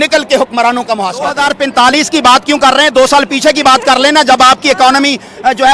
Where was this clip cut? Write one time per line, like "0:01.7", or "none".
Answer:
0:01.3